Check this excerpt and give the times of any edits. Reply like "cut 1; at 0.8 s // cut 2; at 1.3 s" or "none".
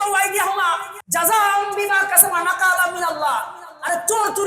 cut 1; at 0.9 s